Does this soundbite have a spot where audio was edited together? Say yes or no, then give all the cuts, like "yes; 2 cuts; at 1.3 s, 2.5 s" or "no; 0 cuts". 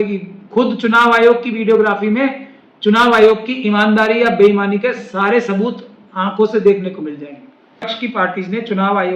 yes; 1 cut; at 8.1 s